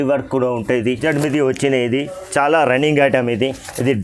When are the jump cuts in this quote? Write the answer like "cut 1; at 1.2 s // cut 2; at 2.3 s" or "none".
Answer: cut 1; at 1.0 s